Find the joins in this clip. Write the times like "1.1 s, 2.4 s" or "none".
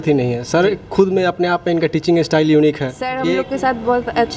3.2 s